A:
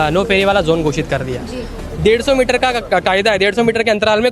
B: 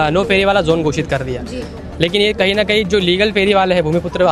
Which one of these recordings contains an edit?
A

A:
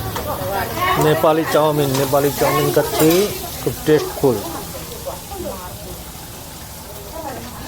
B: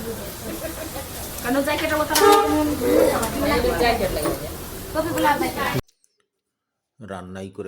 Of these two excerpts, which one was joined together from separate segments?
B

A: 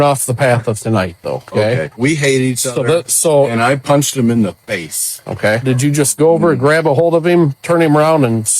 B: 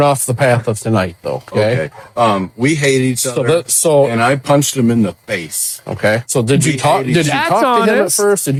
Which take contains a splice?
A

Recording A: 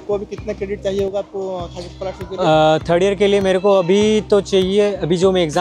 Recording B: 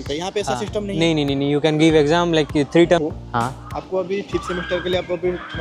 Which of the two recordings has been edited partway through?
B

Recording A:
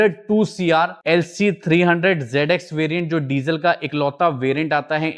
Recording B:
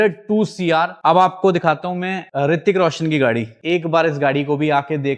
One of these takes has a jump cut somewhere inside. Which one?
B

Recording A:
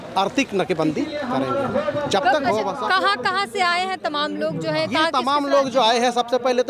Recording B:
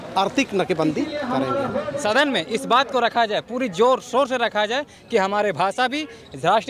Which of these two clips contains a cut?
B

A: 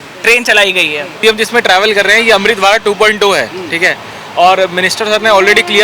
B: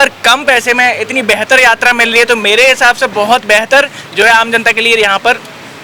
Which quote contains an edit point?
A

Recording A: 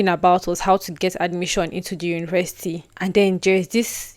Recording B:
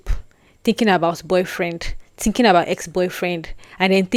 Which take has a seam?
A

